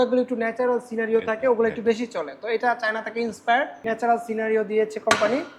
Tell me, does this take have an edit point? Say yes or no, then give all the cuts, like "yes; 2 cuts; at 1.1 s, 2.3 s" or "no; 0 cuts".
yes; 1 cut; at 3.8 s